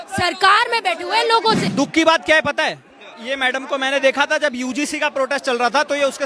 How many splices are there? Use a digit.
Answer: 1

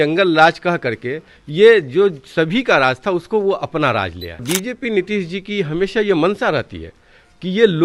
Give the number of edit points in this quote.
1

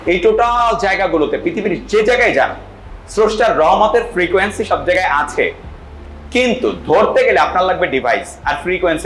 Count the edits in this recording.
0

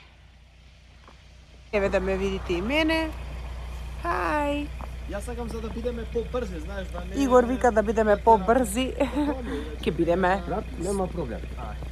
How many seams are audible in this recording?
0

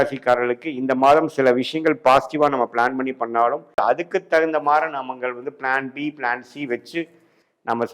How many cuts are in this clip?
1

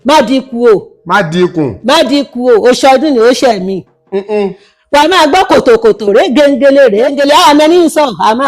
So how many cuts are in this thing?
1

